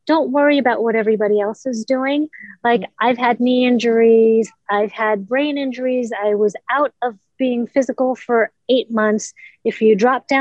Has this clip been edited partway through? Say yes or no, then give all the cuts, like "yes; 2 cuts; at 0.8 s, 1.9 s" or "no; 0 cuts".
no; 0 cuts